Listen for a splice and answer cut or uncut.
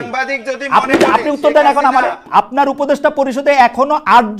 cut